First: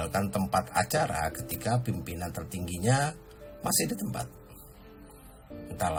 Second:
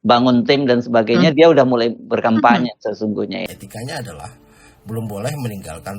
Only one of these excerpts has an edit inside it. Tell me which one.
second; 1 cut; at 3.4 s

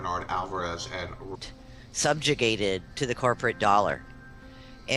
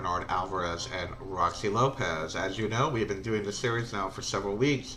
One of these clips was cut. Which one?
second; 1 cut; at 1.4 s

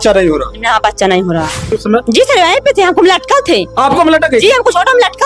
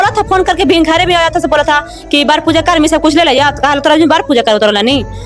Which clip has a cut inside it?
first; 1 cut; at 1.8 s

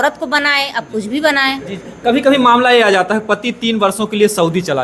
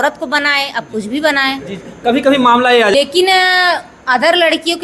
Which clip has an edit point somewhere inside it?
second; 1 cut; at 2.9 s

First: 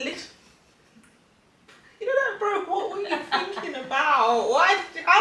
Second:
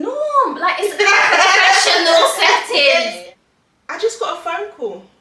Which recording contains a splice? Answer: second; 1 cut; at 3.2 s

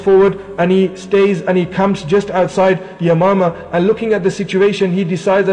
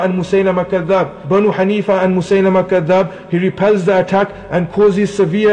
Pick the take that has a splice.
second; 1 cut; at 1.2 s

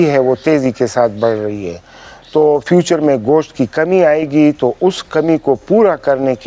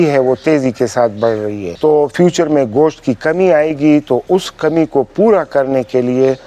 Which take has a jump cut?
second; 1 cut; at 1.6 s

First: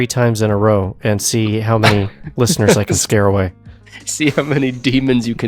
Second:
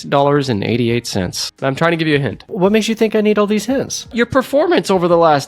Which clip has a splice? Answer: second; 3 cuts; at 1.4 s, 2.6 s, 4.1 s

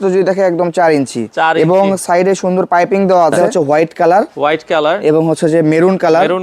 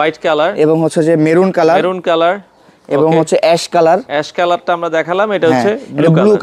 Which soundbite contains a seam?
first; 1 cut; at 3.5 s

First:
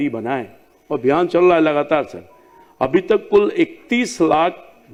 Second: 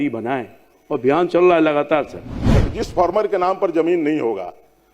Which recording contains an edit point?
second; 1 cut; at 2.6 s

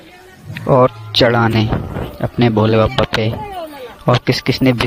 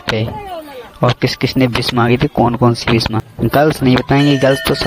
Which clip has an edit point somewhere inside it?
second; 1 cut; at 3.2 s

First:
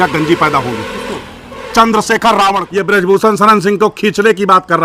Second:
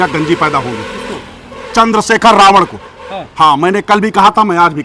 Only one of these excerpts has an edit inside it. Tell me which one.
first; 1 cut; at 2.6 s

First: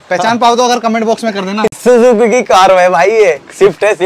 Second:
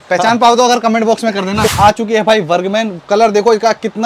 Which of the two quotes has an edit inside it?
second; 1 cut; at 1.8 s

